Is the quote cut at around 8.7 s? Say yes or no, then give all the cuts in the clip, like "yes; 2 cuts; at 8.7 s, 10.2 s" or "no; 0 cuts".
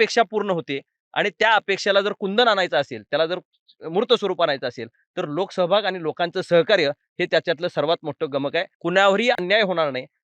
yes; 1 cut; at 8.7 s